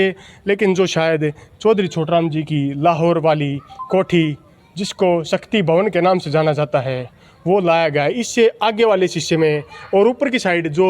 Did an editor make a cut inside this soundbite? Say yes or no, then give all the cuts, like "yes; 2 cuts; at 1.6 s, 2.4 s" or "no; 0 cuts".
no; 0 cuts